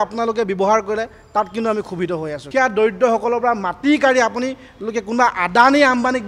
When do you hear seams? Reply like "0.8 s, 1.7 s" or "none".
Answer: 2.4 s